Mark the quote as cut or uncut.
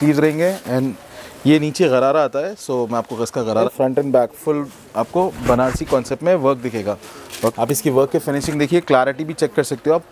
cut